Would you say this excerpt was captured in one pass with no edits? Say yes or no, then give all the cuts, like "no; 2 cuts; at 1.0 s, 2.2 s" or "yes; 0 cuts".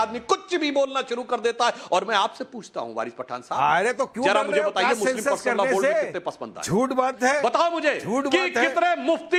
yes; 0 cuts